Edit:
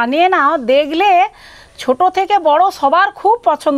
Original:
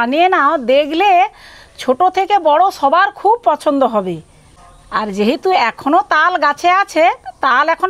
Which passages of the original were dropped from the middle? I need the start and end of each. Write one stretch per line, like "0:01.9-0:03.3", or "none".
none